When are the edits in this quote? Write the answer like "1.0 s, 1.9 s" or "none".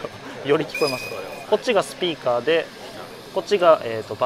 1.4 s